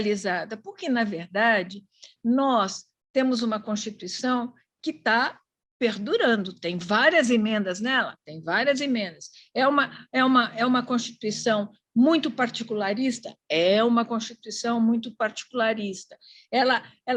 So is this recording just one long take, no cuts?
yes; 0 cuts

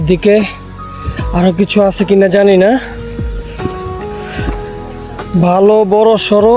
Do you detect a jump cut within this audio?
no; 0 cuts

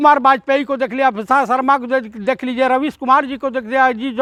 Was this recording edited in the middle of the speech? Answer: no; 0 cuts

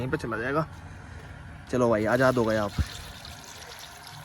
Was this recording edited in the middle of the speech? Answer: no; 0 cuts

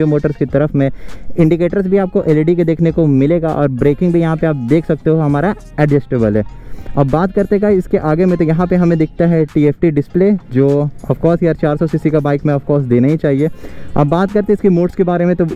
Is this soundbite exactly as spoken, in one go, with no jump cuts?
yes; 0 cuts

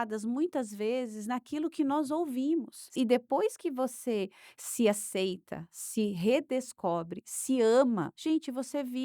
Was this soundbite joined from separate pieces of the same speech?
yes; 2 cuts; at 2.9 s, 8.1 s

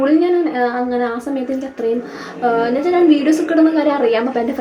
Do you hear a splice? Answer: no; 0 cuts

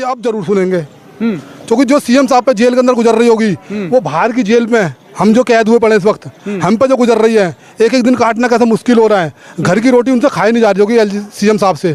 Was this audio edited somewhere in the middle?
no; 0 cuts

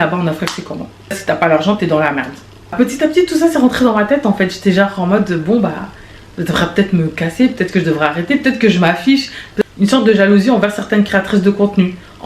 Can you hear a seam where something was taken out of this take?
yes; 3 cuts; at 1.2 s, 2.7 s, 9.5 s

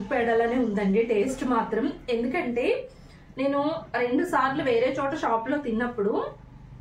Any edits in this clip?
no; 0 cuts

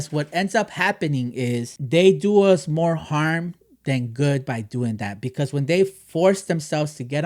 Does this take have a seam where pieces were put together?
yes; 1 cut; at 1.7 s

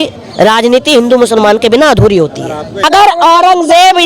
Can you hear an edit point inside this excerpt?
yes; 1 cut; at 2.8 s

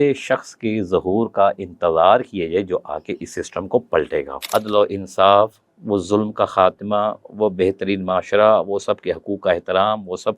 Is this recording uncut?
no; 1 cut; at 4.4 s

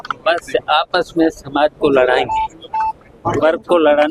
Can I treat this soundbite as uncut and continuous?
yes; 0 cuts

